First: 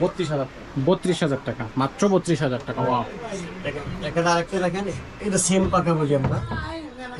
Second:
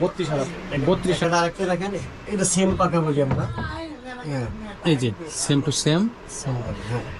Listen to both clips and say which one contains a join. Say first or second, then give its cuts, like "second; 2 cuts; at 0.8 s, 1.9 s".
second; 1 cut; at 1.2 s